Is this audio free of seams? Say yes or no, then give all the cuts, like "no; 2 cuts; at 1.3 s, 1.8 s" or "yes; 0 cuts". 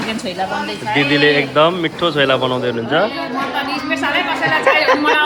yes; 0 cuts